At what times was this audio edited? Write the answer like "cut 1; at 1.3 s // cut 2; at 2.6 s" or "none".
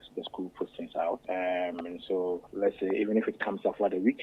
cut 1; at 1.2 s // cut 2; at 2.5 s